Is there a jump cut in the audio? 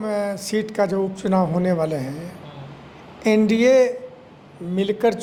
no; 0 cuts

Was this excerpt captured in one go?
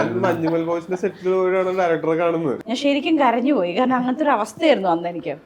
no; 1 cut; at 2.6 s

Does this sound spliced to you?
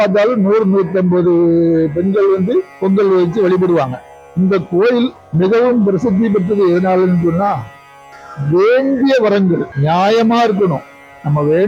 yes; 1 cut; at 4.2 s

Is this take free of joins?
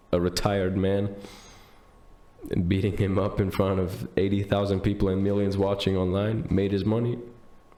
yes; 0 cuts

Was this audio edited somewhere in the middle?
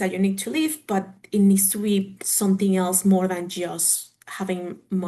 no; 0 cuts

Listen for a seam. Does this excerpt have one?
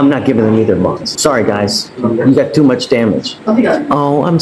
yes; 2 cuts; at 1.1 s, 3.3 s

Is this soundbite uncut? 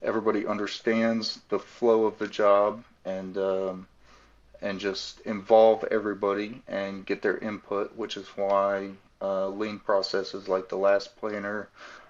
yes; 0 cuts

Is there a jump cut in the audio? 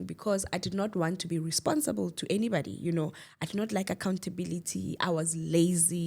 no; 0 cuts

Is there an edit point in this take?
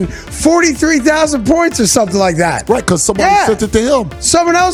no; 0 cuts

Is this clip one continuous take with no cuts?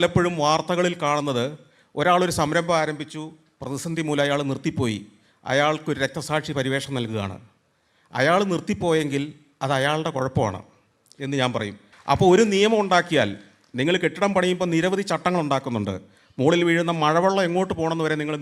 no; 1 cut; at 11.9 s

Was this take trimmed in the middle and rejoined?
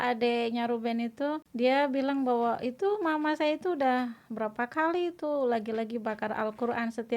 yes; 1 cut; at 1.5 s

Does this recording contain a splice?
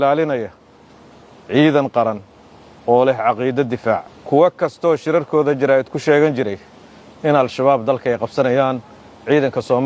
yes; 1 cut; at 4.1 s

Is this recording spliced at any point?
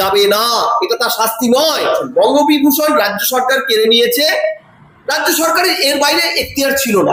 no; 0 cuts

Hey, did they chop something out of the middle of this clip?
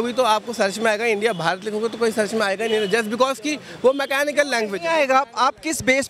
no; 0 cuts

